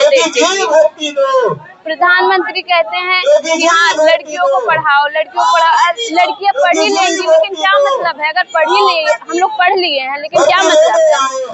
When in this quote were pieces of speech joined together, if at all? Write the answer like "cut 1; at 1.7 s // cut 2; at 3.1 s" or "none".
none